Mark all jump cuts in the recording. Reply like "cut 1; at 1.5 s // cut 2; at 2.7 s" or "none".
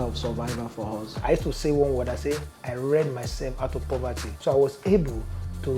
cut 1; at 1.1 s // cut 2; at 4.2 s